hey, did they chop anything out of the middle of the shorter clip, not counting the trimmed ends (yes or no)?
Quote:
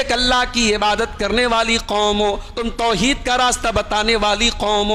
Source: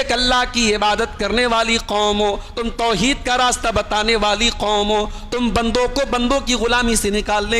no